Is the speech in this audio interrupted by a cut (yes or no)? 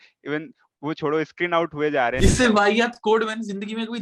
yes